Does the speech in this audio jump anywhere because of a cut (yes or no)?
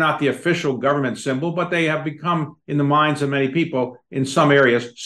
no